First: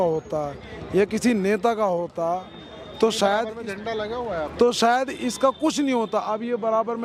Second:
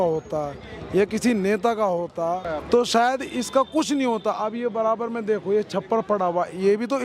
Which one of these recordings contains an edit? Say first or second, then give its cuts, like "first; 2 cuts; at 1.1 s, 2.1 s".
second; 1 cut; at 2.5 s